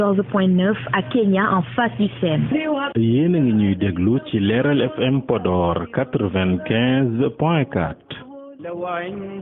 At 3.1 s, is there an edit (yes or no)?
no